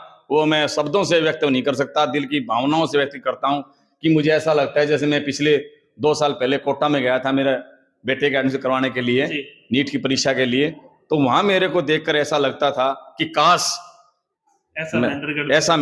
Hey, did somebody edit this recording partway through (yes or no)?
no